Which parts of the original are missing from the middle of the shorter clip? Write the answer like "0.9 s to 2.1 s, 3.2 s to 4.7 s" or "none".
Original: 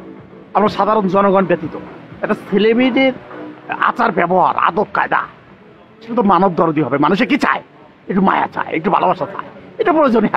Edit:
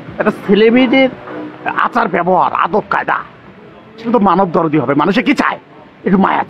none